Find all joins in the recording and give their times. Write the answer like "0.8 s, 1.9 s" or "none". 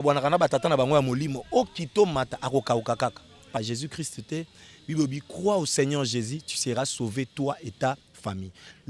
3.6 s